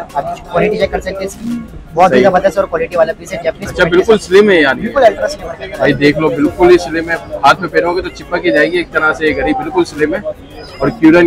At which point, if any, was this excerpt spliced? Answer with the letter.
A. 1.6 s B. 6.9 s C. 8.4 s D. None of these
D